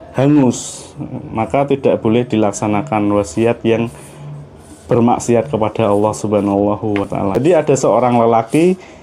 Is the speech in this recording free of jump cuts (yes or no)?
no